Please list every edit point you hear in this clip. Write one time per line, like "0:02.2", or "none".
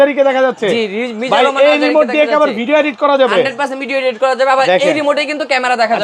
none

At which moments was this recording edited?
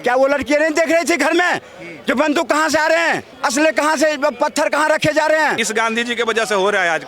0:03.3
0:05.6

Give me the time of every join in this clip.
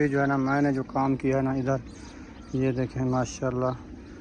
none

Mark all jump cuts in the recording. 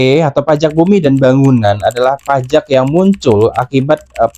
none

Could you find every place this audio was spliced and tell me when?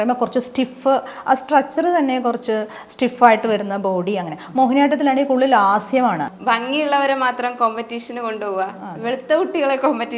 0:06.3

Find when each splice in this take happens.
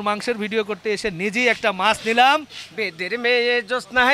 0:02.6

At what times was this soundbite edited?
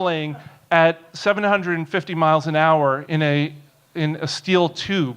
0:02.7

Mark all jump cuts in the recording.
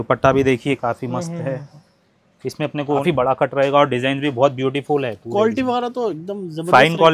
0:03.0

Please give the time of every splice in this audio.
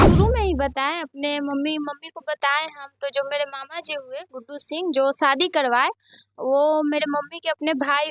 none

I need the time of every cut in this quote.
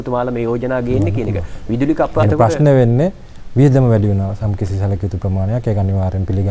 0:02.2

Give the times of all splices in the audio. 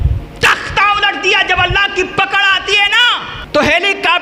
0:03.3

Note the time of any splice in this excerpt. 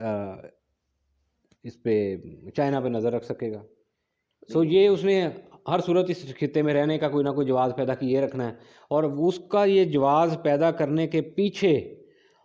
none

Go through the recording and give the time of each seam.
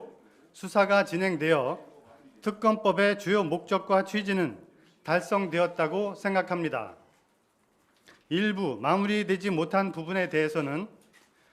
0:09.6

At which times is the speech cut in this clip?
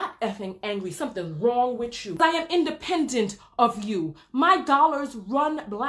0:02.2

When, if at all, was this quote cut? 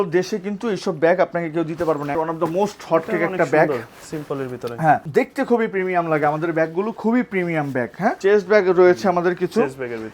0:02.2
0:05.1
0:08.2

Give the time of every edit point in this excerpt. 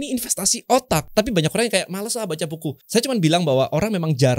0:01.1
0:02.8

